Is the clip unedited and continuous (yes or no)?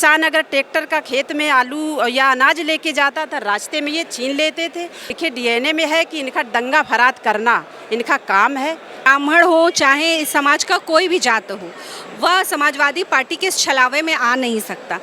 no